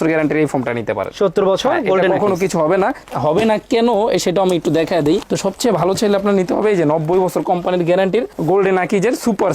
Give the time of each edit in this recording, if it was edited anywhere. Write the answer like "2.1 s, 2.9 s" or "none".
5.2 s